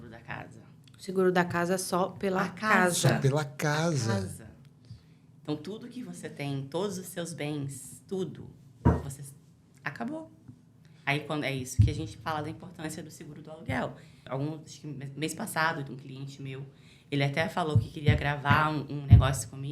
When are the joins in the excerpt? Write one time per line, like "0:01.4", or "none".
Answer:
0:14.2